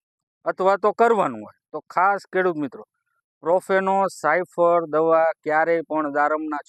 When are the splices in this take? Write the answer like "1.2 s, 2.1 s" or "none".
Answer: none